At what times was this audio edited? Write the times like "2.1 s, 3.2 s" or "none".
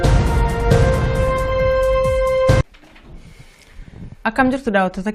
2.6 s

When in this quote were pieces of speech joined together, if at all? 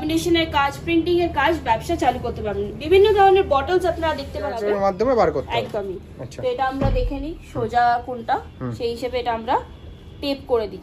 4.6 s

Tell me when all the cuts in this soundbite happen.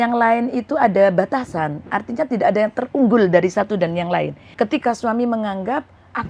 4.4 s

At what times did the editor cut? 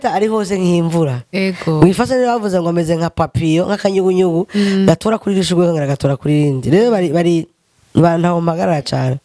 none

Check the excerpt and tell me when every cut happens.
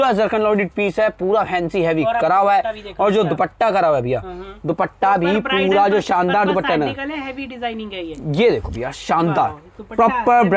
none

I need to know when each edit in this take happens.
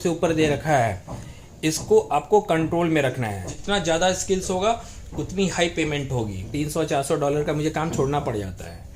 3.5 s, 6.4 s

